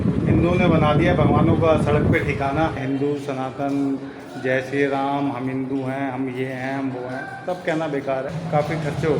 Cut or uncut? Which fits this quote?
cut